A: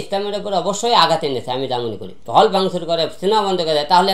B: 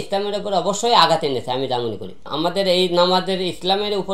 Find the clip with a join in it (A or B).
A